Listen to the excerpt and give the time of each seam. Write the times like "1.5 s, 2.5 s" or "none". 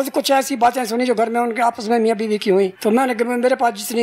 2.8 s